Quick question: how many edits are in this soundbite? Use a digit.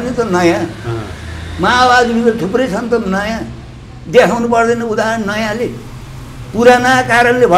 0